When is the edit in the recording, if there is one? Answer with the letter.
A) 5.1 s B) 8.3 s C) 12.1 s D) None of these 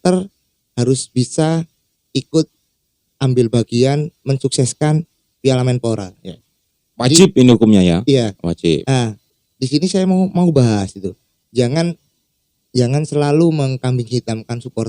D